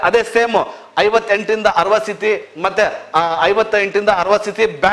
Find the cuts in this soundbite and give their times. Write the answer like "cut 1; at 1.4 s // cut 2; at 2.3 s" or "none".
none

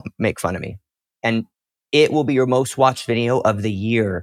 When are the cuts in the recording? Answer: none

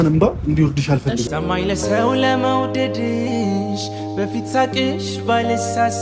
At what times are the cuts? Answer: cut 1; at 1.3 s

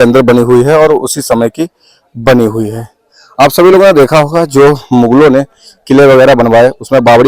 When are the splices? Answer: none

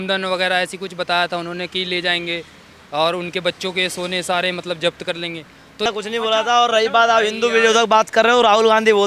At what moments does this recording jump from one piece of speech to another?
cut 1; at 5.9 s

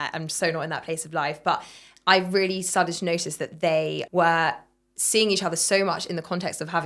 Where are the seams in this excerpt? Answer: cut 1; at 4.0 s

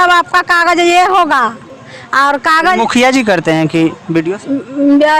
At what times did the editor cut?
none

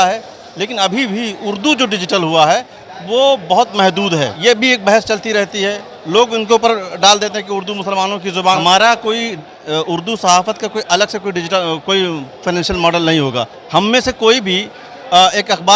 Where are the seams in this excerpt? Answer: cut 1; at 4.3 s // cut 2; at 8.6 s // cut 3; at 13.5 s

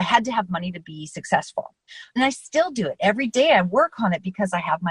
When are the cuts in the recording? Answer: none

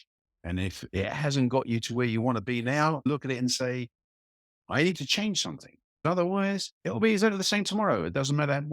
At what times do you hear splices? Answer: cut 1; at 3.1 s // cut 2; at 6.0 s

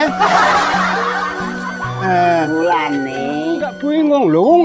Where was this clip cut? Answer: cut 1; at 3.7 s

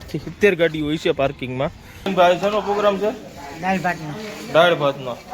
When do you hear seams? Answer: cut 1; at 2.1 s

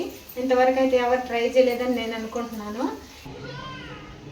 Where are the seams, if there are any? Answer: cut 1; at 3.2 s

